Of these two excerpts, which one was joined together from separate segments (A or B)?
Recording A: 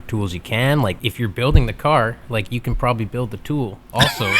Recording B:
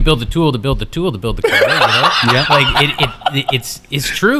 A